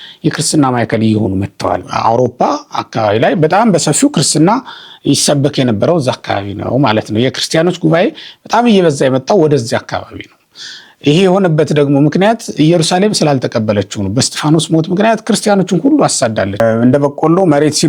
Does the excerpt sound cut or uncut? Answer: cut